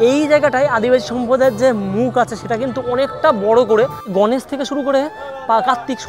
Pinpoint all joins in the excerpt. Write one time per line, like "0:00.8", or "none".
0:04.1

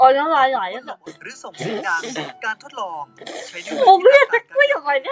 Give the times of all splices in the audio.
0:01.0

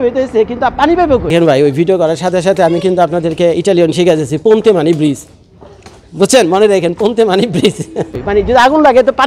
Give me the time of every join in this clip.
0:01.3
0:08.2

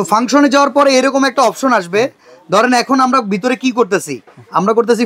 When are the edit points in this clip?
none

